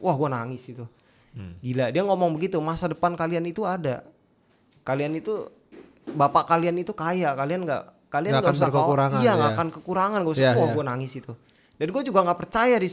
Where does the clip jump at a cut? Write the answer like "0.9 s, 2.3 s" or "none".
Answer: none